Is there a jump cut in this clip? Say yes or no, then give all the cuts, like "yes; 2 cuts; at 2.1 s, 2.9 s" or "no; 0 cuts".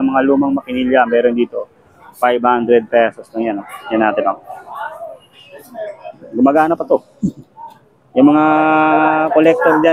no; 0 cuts